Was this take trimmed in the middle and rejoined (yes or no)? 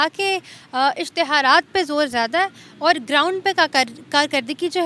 no